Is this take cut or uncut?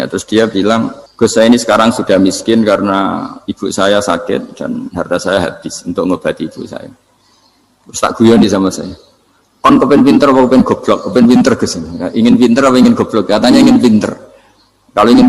cut